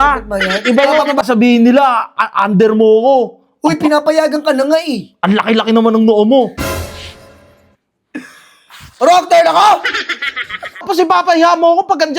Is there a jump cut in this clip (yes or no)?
yes